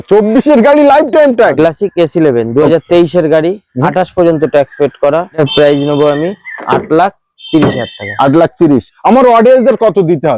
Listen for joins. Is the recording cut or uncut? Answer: cut